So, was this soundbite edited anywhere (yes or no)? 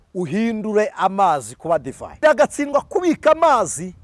yes